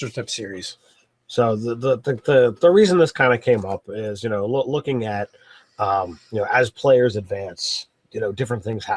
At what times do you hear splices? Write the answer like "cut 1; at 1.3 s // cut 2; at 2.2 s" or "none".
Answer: cut 1; at 6.9 s